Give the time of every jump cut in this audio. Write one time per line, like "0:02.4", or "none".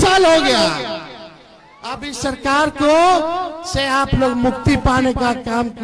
none